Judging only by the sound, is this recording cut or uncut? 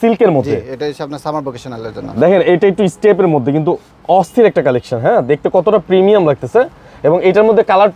uncut